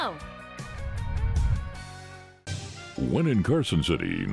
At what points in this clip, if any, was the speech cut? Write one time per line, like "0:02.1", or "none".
0:02.3